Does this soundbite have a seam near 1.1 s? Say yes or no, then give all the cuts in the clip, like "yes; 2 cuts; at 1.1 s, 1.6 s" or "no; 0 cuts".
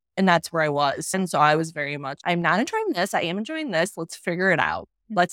yes; 1 cut; at 1.1 s